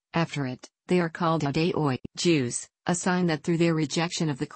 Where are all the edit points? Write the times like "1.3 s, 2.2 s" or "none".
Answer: none